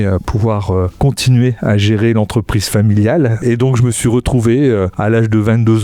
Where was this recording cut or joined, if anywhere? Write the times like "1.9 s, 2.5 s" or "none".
1.0 s, 3.4 s, 4.9 s

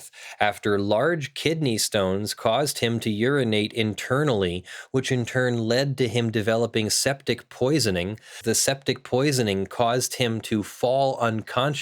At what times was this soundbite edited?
8.4 s

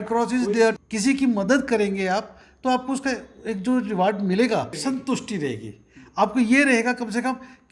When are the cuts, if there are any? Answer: 0.8 s, 4.7 s

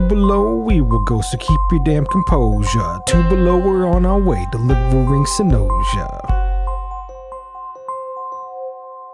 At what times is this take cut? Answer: none

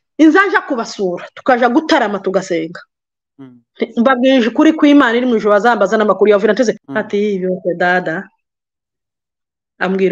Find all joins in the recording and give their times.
6.9 s

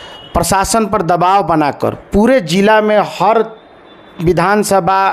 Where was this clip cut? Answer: 2.0 s

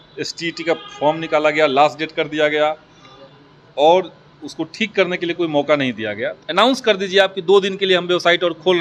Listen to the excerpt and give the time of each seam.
6.4 s

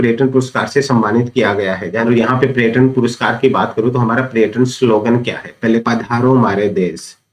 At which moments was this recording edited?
2.1 s, 5.8 s

